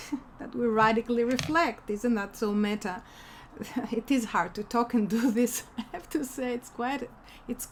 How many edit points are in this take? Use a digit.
0